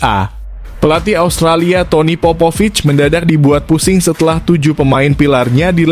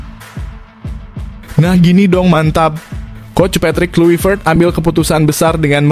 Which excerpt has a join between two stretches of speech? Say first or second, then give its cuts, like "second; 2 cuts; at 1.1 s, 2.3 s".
second; 1 cut; at 1.5 s